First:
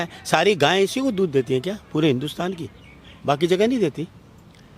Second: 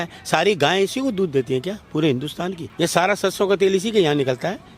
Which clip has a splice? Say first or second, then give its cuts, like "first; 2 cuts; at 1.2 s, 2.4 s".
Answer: second; 1 cut; at 2.6 s